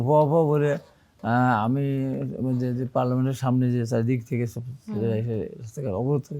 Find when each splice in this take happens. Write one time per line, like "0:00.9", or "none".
none